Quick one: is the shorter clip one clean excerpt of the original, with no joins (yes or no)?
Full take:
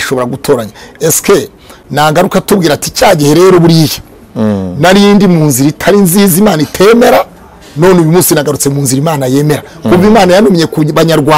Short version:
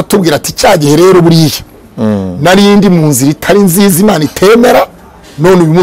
yes